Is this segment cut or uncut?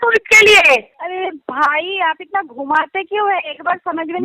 cut